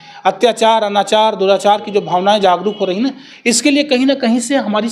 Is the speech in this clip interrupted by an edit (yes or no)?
no